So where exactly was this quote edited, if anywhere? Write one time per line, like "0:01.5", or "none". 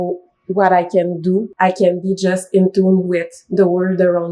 0:01.5